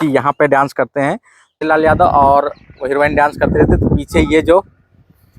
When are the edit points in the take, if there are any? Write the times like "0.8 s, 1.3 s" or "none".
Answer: 1.6 s